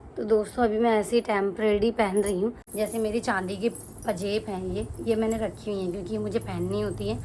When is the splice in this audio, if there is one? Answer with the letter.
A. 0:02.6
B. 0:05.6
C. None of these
A